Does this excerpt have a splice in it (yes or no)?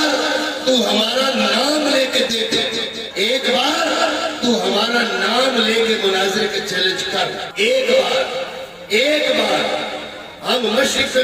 yes